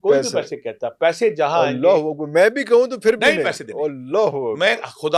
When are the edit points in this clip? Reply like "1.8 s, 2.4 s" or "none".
none